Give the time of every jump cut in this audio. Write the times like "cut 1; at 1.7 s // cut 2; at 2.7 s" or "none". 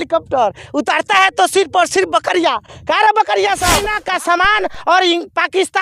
cut 1; at 3.9 s